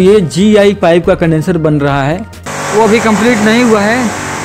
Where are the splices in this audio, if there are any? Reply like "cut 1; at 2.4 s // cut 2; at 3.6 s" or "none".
cut 1; at 2.3 s